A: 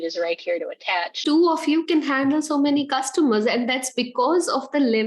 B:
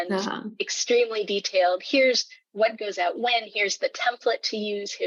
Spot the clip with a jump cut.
A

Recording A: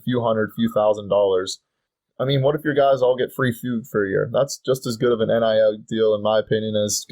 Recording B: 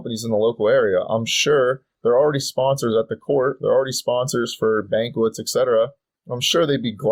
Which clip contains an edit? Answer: A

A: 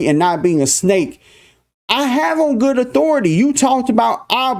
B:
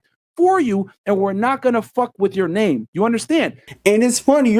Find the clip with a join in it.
B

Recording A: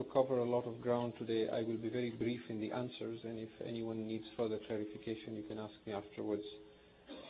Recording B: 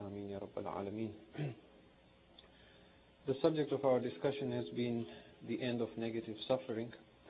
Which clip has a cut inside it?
B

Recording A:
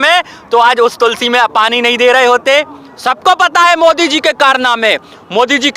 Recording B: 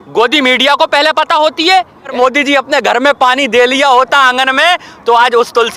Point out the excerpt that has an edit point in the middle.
B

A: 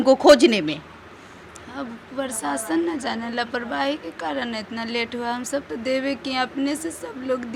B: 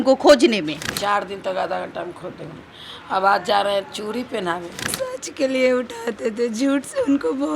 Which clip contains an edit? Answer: B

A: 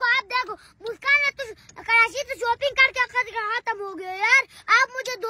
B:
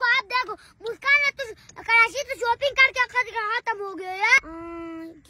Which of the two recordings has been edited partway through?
B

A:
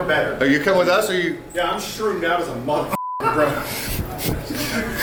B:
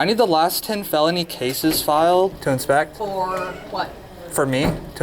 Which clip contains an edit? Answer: B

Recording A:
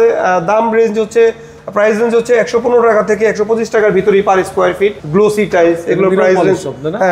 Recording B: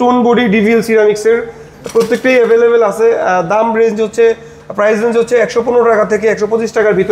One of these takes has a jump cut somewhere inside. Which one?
A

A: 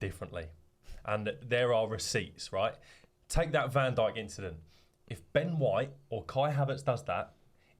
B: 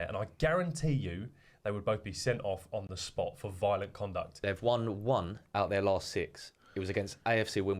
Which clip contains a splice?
B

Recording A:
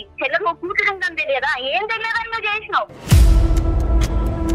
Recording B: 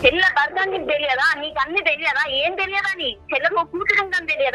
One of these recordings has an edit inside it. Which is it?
A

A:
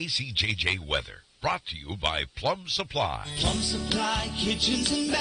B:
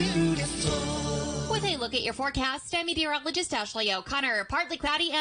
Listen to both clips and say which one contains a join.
B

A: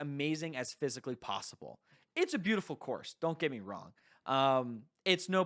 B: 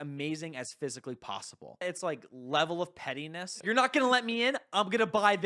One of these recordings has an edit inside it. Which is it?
B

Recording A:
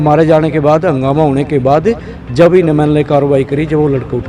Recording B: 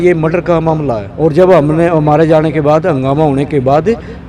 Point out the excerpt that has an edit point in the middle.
B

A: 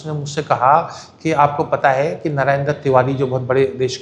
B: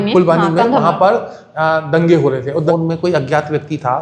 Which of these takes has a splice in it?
B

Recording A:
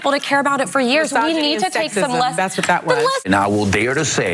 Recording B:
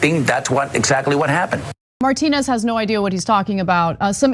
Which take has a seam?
B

